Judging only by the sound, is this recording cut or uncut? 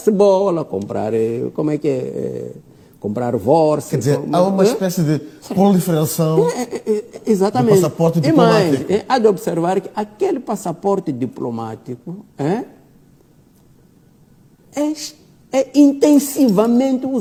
uncut